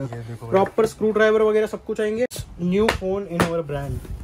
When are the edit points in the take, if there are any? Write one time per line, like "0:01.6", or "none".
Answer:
0:02.4